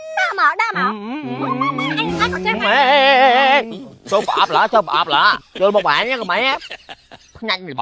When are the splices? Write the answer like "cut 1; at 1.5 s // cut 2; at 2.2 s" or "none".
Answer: none